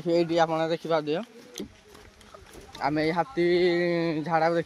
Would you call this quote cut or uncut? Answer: cut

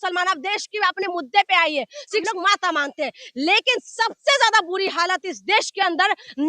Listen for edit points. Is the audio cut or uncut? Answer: cut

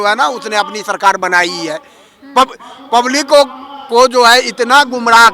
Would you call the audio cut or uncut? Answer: uncut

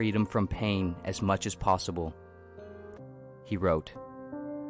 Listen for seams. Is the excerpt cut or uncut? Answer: cut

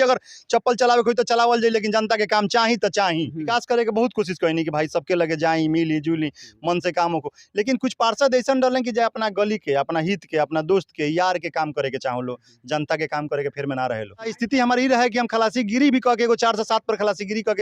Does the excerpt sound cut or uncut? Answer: cut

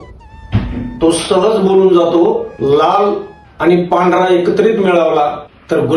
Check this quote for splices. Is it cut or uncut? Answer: uncut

